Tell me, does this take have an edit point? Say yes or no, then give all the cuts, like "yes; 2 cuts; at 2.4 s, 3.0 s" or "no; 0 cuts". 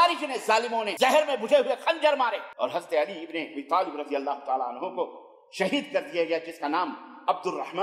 yes; 2 cuts; at 0.9 s, 2.5 s